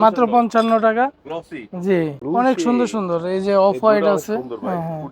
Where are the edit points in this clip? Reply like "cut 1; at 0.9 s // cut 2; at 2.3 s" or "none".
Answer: cut 1; at 2.2 s

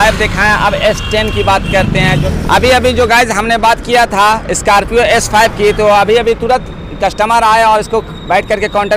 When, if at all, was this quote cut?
cut 1; at 2.3 s

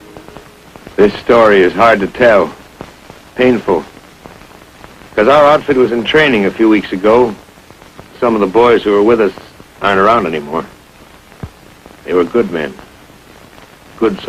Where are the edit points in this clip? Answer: none

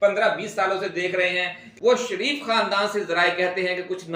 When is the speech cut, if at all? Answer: cut 1; at 1.6 s

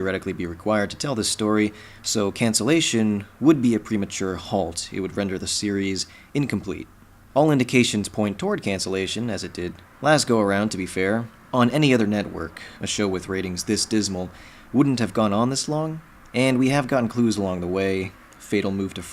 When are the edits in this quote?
cut 1; at 14.1 s

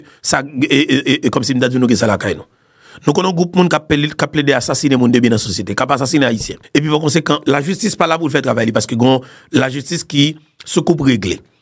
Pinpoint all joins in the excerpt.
cut 1; at 6.5 s

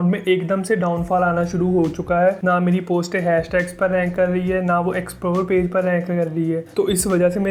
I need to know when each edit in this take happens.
none

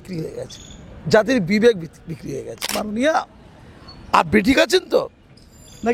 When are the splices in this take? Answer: cut 1; at 2.8 s

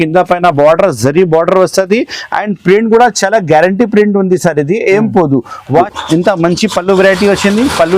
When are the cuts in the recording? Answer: cut 1; at 5.9 s

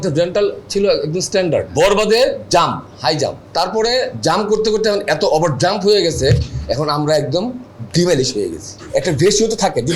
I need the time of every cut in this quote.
cut 1; at 1.7 s // cut 2; at 3.4 s // cut 3; at 8.7 s

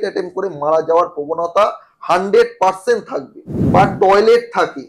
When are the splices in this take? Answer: cut 1; at 3.5 s

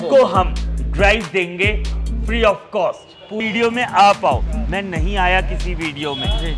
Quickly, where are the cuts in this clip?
cut 1; at 3.4 s

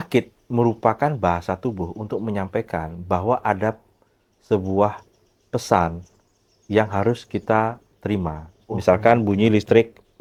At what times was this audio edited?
none

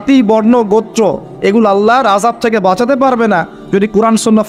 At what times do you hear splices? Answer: none

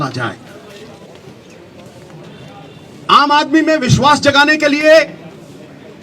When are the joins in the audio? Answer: cut 1; at 1.0 s

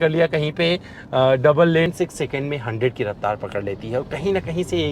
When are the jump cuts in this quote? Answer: cut 1; at 1.9 s

